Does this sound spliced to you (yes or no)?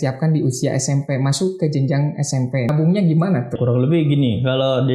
yes